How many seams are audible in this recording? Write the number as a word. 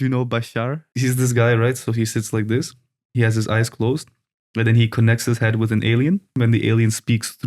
two